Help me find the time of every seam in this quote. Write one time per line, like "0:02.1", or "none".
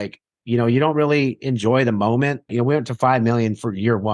0:02.5